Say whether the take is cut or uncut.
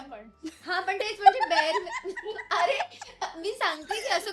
uncut